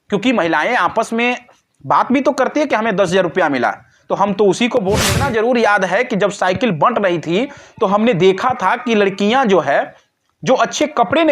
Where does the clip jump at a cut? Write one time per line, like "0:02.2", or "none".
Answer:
0:05.1